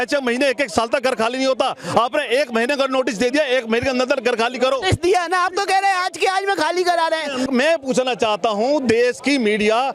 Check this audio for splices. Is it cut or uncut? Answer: uncut